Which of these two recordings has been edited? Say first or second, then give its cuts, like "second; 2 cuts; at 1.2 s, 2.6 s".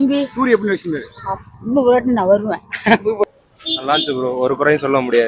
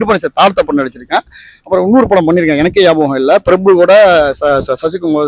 first; 1 cut; at 3.2 s